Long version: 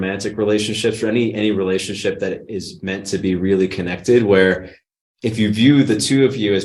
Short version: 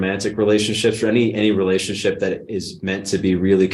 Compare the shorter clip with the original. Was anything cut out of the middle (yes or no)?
no